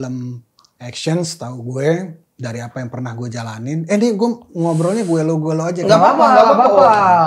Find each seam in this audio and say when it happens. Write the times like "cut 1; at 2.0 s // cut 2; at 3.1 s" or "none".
none